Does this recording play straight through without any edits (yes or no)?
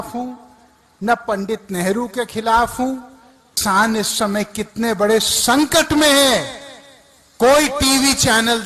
no